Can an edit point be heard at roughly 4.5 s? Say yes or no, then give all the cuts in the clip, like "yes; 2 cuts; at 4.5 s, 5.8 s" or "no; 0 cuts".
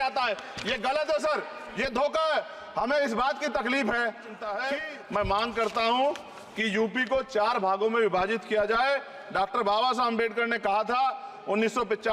yes; 1 cut; at 4.5 s